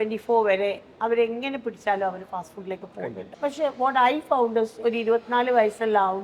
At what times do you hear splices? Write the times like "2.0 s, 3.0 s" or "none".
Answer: 3.2 s